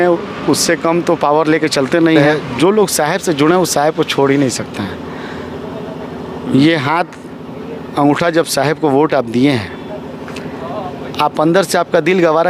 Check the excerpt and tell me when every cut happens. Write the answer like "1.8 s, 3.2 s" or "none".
2.3 s